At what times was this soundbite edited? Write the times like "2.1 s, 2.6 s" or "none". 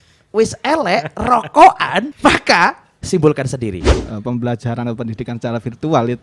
2.1 s, 2.9 s, 3.9 s